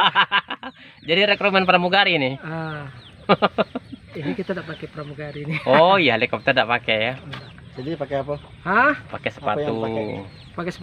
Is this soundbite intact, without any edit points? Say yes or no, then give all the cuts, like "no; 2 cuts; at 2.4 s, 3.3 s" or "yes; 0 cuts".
yes; 0 cuts